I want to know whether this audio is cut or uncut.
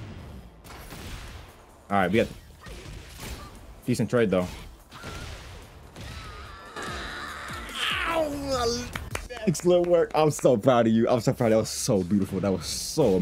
uncut